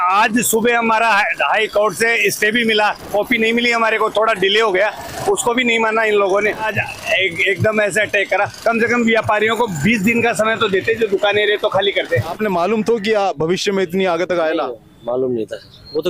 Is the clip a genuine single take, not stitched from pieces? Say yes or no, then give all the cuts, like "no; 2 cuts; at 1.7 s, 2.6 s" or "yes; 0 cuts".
no; 3 cuts; at 3.1 s, 6.7 s, 12.3 s